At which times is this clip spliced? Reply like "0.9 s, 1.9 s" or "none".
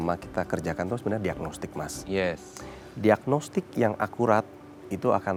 none